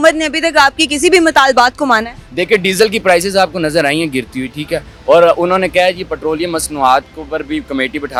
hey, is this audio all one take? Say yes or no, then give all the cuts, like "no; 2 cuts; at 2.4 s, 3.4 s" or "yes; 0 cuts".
yes; 0 cuts